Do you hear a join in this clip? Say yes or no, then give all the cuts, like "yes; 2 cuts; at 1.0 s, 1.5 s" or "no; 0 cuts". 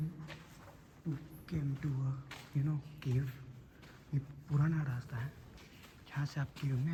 no; 0 cuts